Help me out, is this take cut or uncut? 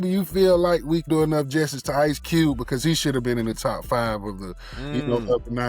cut